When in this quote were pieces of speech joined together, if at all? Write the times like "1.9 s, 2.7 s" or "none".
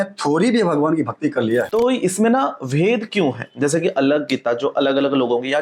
1.7 s